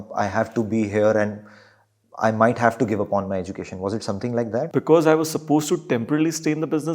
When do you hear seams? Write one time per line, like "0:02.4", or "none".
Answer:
0:04.7